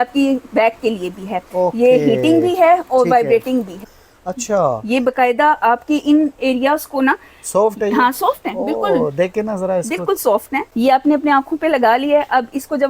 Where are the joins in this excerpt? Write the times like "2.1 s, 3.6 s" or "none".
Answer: 4.3 s, 10.7 s